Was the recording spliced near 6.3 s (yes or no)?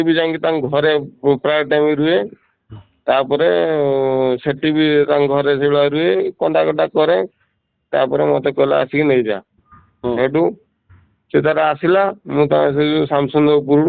no